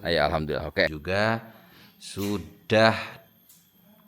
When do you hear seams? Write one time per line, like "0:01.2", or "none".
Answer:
0:01.0